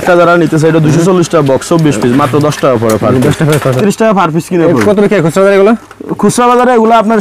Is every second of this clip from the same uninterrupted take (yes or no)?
no